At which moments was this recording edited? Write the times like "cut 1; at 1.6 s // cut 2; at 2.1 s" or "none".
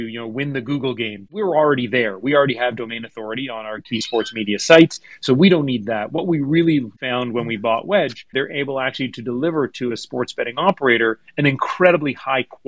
cut 1; at 1.4 s // cut 2; at 3.8 s // cut 3; at 6.9 s // cut 4; at 8.3 s